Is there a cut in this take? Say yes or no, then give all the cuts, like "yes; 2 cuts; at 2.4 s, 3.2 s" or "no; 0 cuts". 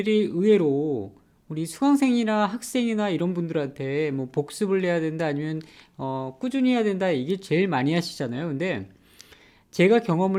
no; 0 cuts